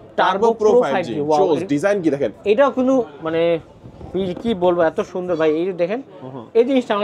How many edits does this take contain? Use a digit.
0